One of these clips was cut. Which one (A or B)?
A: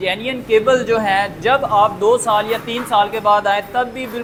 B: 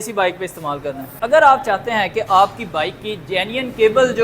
B